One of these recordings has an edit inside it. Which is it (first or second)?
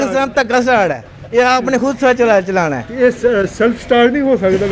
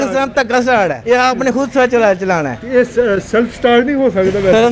second